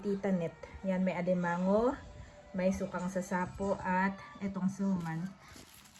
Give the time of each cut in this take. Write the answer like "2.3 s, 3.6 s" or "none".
none